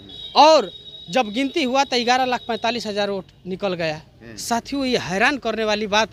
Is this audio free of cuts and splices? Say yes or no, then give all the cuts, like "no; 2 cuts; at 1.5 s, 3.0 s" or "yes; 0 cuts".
yes; 0 cuts